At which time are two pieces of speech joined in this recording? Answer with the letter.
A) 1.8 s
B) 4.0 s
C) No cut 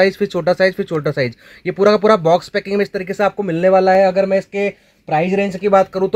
C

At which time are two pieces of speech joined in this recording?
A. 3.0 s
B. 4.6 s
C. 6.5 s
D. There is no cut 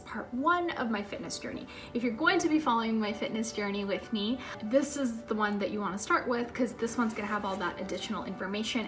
B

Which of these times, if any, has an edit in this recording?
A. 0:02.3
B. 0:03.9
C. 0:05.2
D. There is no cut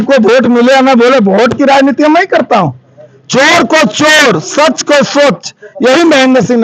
D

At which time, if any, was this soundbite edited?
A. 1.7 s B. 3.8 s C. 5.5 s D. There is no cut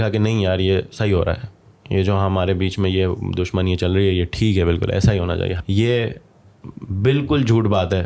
C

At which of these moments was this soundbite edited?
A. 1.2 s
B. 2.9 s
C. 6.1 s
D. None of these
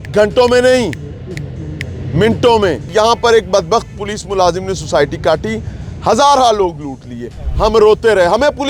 B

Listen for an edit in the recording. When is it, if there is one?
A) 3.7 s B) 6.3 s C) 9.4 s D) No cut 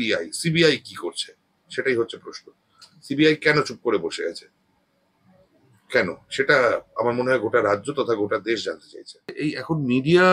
C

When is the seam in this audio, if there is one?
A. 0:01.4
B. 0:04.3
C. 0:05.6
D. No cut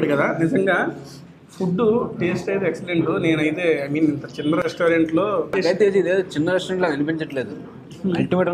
C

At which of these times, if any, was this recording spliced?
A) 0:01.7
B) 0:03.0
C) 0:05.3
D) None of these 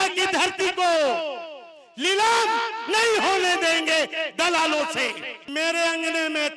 C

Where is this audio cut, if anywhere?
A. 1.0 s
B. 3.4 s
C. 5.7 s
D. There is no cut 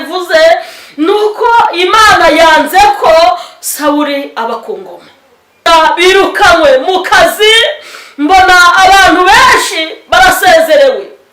C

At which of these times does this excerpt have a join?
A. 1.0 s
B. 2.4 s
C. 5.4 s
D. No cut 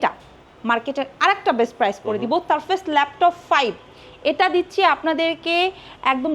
B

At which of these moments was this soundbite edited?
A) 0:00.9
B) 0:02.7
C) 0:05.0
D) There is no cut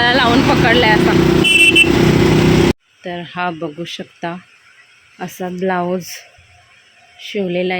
B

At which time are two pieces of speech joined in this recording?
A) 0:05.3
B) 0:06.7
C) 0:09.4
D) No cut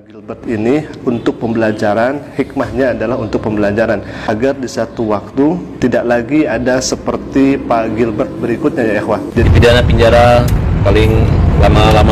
C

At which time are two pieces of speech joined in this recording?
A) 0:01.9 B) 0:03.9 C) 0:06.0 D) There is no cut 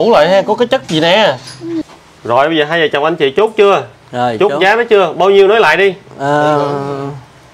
A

